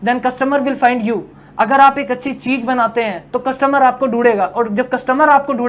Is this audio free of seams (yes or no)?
yes